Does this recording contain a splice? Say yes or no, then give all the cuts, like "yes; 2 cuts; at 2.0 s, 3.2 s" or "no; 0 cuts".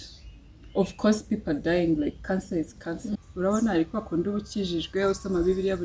yes; 1 cut; at 3.2 s